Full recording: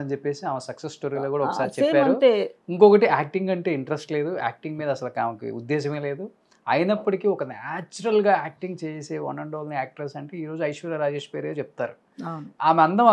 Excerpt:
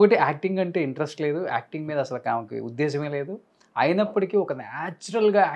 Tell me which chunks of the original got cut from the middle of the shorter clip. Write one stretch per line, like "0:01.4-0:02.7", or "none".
none